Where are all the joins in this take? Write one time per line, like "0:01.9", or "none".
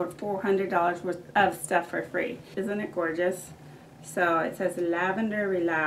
0:01.2
0:02.5